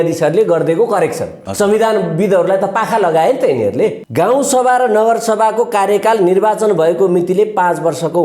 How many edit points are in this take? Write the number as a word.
two